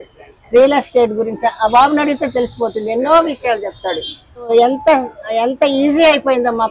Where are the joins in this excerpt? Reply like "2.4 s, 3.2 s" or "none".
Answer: 4.5 s